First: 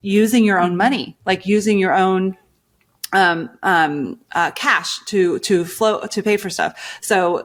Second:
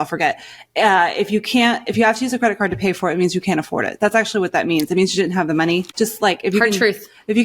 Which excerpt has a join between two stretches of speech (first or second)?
second